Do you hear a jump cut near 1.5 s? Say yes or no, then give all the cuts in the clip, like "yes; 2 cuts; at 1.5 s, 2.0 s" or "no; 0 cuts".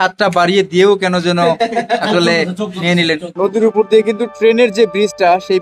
no; 1 cut; at 3.3 s